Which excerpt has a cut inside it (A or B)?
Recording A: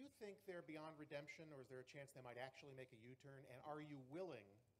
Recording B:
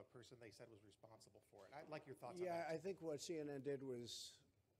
A